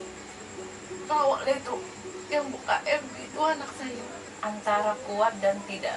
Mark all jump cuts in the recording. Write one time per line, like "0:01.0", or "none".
0:04.2